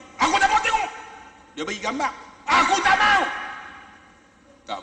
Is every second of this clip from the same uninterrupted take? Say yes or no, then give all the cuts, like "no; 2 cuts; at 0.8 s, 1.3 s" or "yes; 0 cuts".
yes; 0 cuts